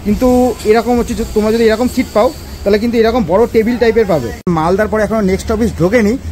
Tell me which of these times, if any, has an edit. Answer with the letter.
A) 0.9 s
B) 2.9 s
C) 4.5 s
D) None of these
C